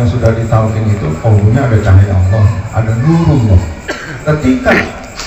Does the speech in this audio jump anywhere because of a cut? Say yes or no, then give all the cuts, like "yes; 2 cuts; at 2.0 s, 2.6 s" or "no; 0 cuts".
yes; 1 cut; at 4.1 s